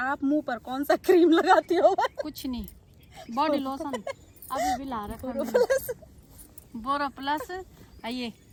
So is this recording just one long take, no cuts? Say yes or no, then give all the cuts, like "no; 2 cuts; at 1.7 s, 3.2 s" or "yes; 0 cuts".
yes; 0 cuts